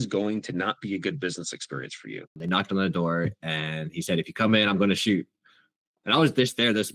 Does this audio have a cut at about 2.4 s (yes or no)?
yes